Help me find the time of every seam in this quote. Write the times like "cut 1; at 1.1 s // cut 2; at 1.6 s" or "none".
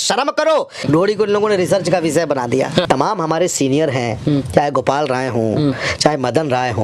cut 1; at 0.8 s // cut 2; at 2.8 s